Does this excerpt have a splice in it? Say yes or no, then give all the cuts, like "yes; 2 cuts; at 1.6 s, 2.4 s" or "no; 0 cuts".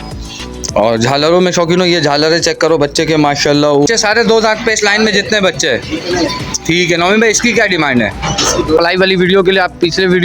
yes; 2 cuts; at 3.9 s, 8.8 s